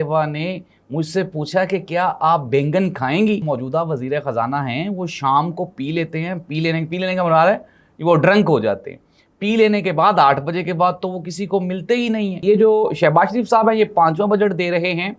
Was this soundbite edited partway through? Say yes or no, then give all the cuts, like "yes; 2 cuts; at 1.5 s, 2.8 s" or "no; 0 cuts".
yes; 2 cuts; at 3.4 s, 12.3 s